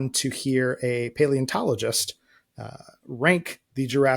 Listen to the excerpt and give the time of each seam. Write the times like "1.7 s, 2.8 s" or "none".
none